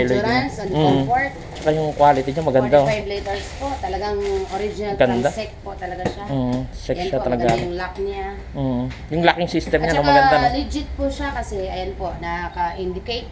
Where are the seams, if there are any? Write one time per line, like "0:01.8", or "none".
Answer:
0:01.4